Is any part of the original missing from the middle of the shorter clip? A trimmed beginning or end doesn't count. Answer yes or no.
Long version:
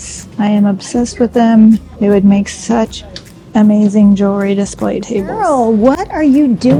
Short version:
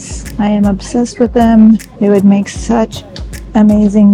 no